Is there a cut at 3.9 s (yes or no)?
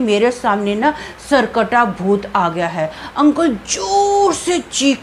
no